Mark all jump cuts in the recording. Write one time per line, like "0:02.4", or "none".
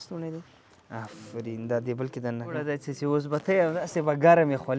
0:02.6